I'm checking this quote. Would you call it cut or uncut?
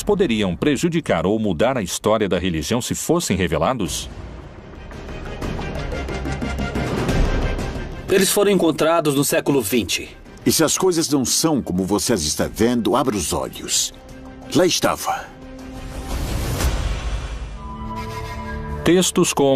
cut